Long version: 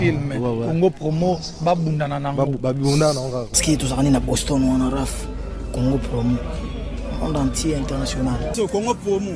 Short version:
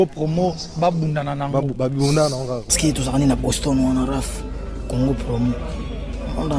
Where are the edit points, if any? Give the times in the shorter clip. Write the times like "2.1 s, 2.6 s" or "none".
none